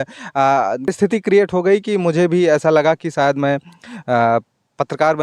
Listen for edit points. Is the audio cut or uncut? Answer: cut